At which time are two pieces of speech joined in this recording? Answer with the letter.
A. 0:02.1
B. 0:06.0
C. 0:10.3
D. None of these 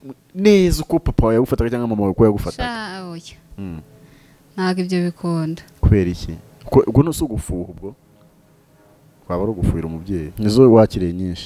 C